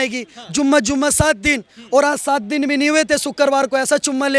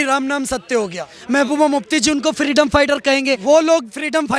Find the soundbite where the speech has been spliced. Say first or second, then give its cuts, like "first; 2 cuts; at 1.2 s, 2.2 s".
second; 2 cuts; at 1.1 s, 3.4 s